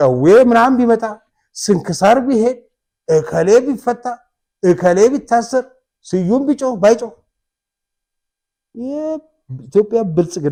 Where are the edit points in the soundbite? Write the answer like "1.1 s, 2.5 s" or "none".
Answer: none